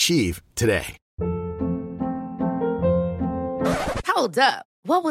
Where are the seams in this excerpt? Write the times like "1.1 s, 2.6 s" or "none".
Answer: 1.0 s